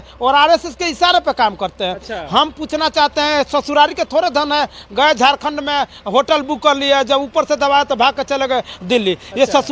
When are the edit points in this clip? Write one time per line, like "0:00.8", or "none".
none